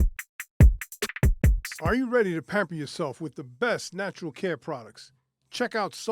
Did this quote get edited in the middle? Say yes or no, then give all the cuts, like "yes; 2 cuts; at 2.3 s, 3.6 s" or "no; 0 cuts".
yes; 1 cut; at 1.6 s